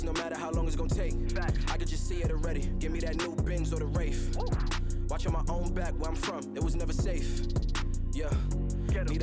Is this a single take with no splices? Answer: yes; 0 cuts

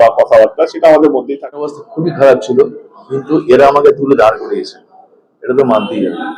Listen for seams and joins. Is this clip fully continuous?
no; 1 cut; at 1.8 s

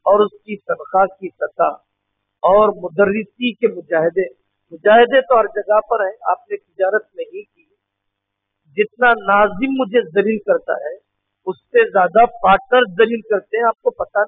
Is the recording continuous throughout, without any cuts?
yes; 0 cuts

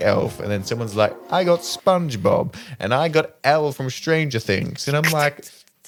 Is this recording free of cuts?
yes; 0 cuts

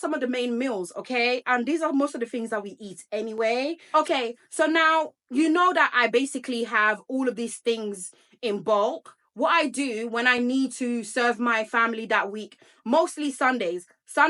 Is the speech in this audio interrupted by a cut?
no; 0 cuts

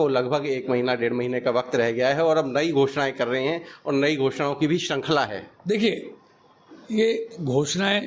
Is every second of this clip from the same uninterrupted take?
yes; 0 cuts

